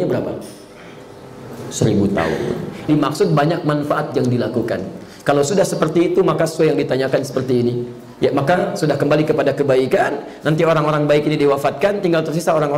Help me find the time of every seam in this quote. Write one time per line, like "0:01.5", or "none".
0:02.9

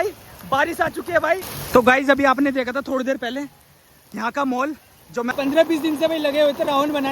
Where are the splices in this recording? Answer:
0:01.5
0:05.3

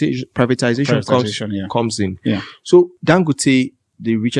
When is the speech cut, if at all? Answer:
0:03.0

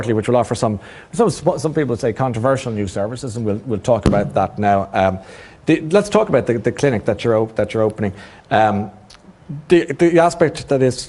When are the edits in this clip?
0:02.0

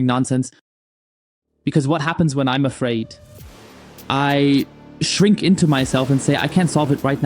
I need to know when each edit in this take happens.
none

